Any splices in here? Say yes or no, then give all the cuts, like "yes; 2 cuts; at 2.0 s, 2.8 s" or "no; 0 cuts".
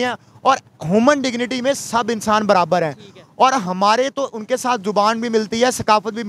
no; 0 cuts